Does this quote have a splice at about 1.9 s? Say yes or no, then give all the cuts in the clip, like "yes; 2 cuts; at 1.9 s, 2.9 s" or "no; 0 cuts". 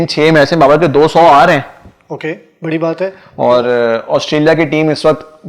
no; 1 cut; at 3.2 s